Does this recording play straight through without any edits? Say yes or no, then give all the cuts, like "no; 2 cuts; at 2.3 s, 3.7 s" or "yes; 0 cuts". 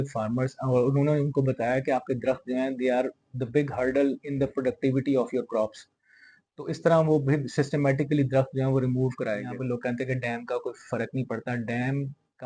no; 1 cut; at 9.5 s